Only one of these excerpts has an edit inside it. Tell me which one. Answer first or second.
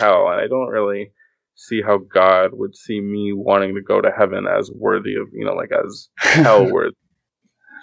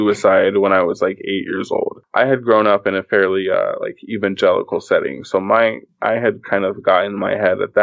second